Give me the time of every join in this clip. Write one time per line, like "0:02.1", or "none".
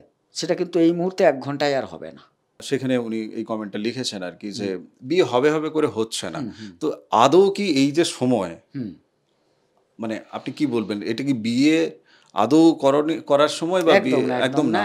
0:02.6